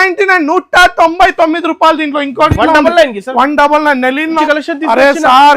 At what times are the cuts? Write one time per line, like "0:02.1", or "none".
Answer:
0:04.4